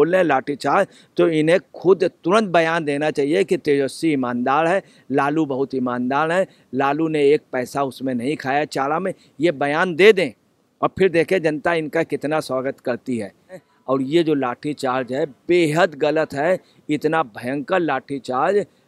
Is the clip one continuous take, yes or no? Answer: no